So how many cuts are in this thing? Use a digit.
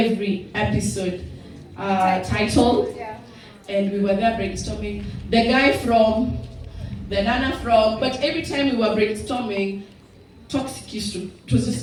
0